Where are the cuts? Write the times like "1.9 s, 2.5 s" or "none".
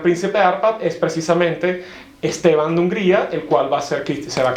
none

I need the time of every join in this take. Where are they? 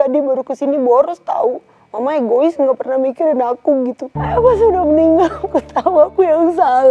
4.1 s

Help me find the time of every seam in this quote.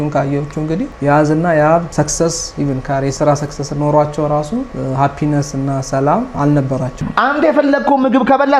0.9 s, 1.9 s, 4.7 s, 6.9 s

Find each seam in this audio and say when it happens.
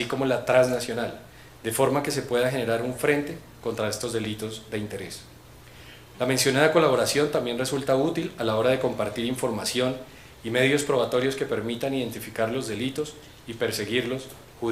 none

